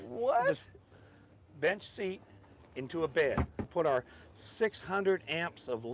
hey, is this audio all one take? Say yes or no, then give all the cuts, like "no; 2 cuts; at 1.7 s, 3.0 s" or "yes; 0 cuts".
no; 1 cut; at 3.7 s